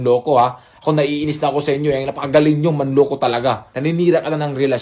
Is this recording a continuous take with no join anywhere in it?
no; 1 cut; at 3.7 s

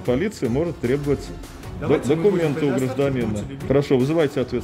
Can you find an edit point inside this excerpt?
yes; 1 cut; at 3.5 s

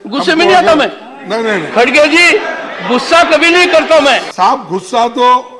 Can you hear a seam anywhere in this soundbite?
yes; 1 cut; at 4.3 s

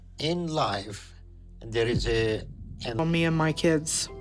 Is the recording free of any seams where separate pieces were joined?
no; 1 cut; at 3.0 s

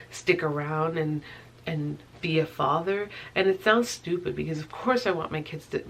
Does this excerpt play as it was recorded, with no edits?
yes; 0 cuts

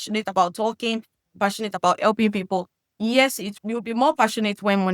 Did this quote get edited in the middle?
yes; 1 cut; at 3.5 s

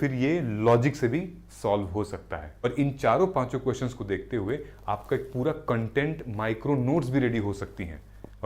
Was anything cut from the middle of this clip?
yes; 1 cut; at 2.6 s

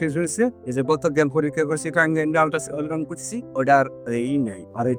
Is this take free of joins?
yes; 0 cuts

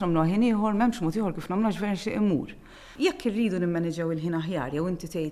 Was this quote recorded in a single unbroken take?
no; 1 cut; at 2.8 s

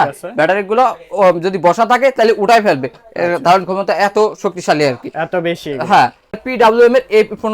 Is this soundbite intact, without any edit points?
no; 1 cut; at 6.3 s

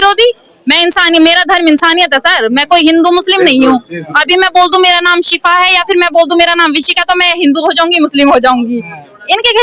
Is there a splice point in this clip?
no; 0 cuts

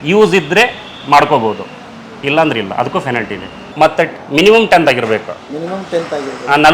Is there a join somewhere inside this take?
yes; 1 cut; at 3.6 s

